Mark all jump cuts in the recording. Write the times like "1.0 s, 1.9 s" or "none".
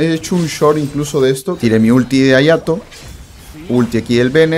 1.6 s